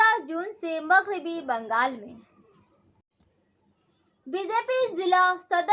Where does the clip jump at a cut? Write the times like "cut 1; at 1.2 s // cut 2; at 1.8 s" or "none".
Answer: cut 1; at 3.1 s